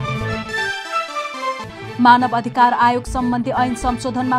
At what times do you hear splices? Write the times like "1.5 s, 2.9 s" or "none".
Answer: none

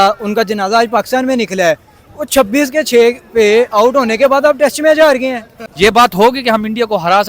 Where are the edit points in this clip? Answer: 5.6 s

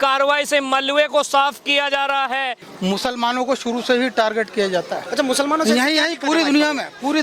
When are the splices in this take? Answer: 2.6 s

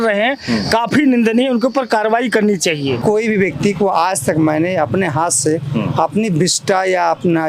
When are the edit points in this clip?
3.0 s

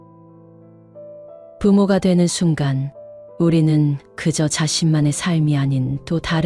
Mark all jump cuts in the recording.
1.6 s

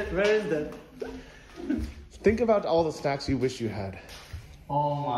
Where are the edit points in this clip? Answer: 1.8 s

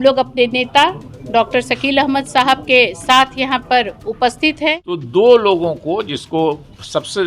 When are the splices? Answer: 4.9 s

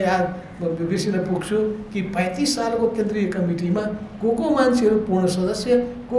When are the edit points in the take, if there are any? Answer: none

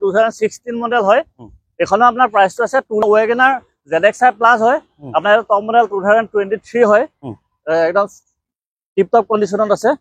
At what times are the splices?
3.0 s

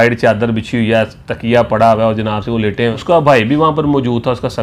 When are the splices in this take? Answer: 3.0 s

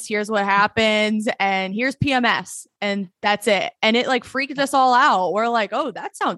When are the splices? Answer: none

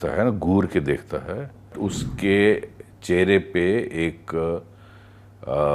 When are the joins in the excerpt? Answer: 1.7 s

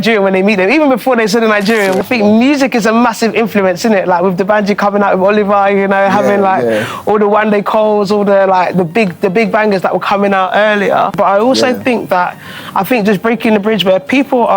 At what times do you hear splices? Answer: 2.0 s, 11.1 s

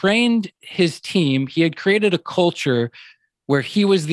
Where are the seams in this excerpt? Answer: none

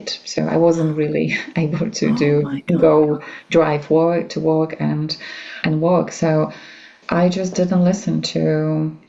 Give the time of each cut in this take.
none

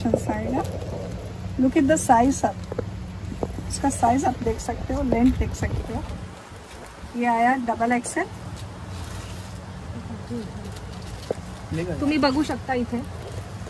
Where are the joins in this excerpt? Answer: none

